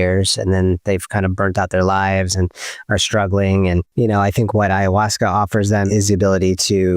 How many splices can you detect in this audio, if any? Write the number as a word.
two